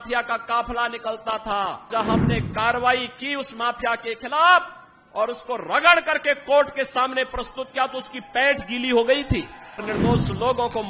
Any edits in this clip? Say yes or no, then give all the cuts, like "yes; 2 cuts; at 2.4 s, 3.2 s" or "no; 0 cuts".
yes; 2 cuts; at 1.9 s, 9.8 s